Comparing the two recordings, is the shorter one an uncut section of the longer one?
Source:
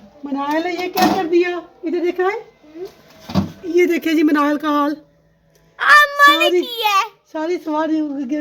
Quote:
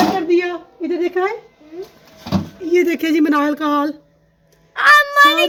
yes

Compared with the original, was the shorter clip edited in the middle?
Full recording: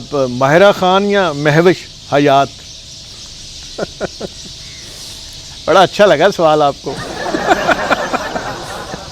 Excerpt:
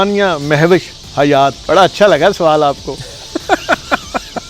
yes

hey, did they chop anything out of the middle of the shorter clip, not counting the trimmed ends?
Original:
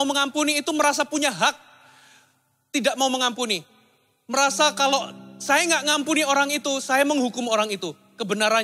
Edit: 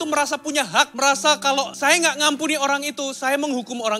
yes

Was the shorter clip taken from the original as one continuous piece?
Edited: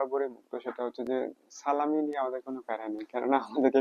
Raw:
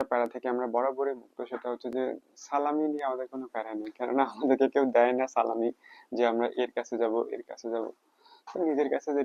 yes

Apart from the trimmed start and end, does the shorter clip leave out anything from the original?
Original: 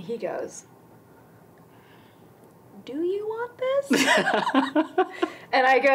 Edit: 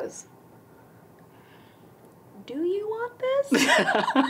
no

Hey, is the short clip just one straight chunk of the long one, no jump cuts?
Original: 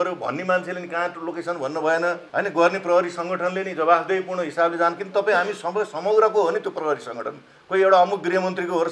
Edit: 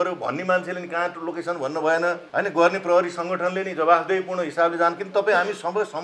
yes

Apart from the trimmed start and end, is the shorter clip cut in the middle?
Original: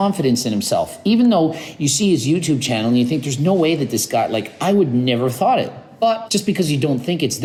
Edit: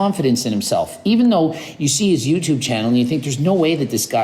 no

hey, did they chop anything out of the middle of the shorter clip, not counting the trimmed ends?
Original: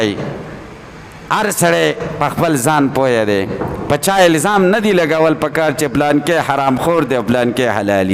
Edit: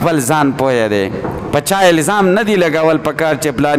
no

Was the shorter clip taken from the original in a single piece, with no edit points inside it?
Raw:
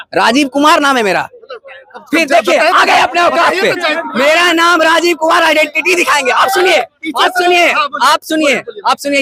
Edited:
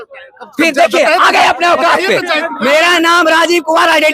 yes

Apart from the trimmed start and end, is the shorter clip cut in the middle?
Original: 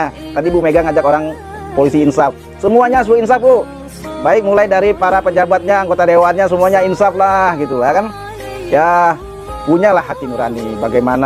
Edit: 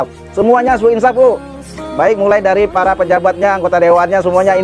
no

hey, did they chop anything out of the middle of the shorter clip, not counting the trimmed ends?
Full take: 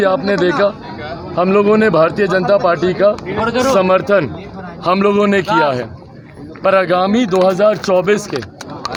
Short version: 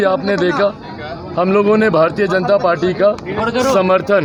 no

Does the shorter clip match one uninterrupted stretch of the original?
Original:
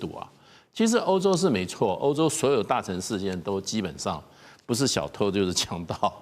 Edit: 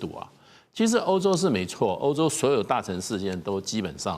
yes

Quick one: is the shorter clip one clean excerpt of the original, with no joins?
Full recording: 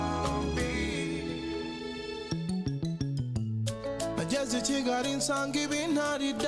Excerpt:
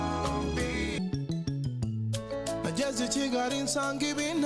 no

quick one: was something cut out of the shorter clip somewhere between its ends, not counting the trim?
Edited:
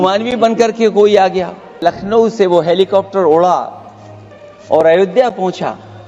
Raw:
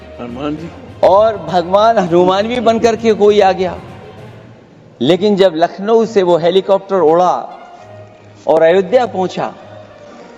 yes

